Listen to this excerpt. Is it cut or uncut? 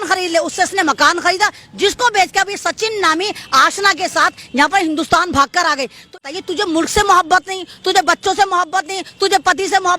cut